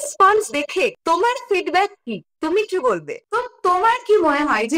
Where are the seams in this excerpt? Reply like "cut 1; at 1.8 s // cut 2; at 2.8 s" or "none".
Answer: cut 1; at 3.2 s